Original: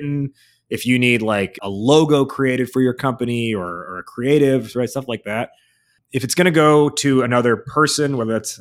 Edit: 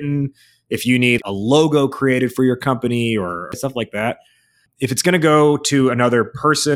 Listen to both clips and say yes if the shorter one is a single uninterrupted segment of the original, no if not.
no